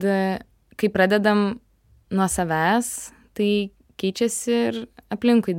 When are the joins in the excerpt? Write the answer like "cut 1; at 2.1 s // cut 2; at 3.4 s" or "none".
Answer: none